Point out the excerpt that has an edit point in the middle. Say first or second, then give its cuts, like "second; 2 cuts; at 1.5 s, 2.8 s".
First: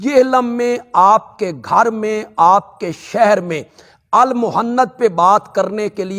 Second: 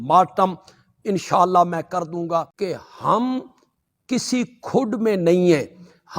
second; 1 cut; at 2.6 s